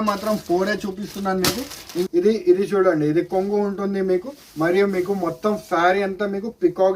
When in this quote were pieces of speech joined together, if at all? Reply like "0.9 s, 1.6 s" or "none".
2.1 s